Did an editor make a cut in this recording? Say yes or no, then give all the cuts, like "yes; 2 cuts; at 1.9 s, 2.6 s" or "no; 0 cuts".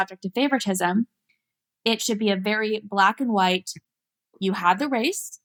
no; 0 cuts